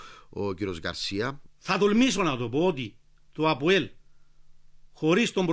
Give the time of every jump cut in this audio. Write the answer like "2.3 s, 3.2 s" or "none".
1.4 s